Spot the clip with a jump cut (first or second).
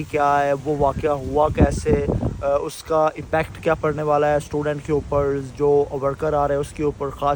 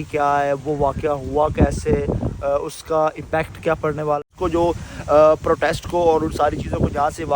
second